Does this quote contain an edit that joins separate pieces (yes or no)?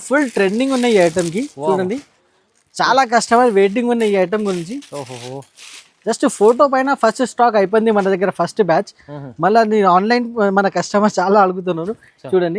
no